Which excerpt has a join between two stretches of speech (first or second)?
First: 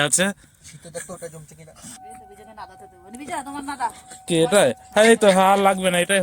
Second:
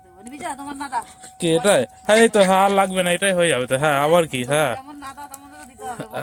first